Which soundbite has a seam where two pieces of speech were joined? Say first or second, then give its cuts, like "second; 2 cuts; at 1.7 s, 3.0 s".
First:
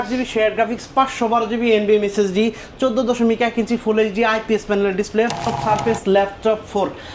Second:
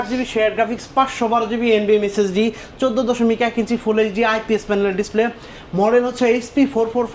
first; 1 cut; at 5.5 s